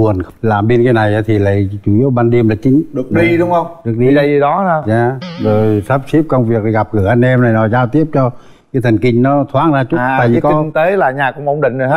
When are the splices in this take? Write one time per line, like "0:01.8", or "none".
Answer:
none